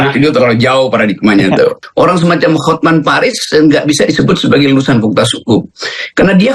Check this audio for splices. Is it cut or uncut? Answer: cut